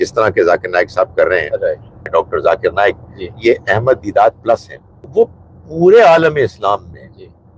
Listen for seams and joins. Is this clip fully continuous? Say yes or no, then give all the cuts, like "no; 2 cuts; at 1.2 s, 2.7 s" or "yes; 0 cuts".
no; 2 cuts; at 2.0 s, 5.1 s